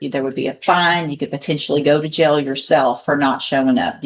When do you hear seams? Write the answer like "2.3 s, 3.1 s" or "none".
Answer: none